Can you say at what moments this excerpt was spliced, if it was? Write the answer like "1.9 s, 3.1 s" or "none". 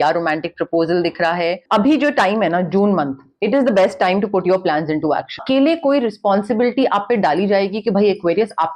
1.6 s, 5.4 s